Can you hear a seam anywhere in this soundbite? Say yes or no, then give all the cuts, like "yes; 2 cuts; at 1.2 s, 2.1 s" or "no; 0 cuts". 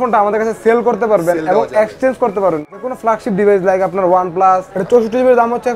yes; 1 cut; at 4.7 s